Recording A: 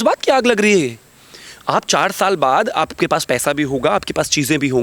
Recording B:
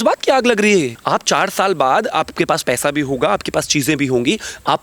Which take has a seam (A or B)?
B